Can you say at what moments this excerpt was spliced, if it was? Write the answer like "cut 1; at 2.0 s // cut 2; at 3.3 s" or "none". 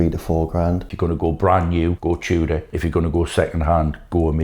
cut 1; at 0.9 s // cut 2; at 2.0 s // cut 3; at 2.7 s